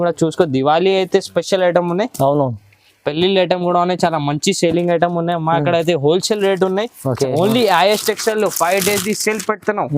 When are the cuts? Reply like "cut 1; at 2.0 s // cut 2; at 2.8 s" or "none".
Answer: cut 1; at 7.1 s